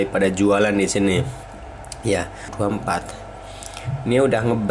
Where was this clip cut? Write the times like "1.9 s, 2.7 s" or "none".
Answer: 2.5 s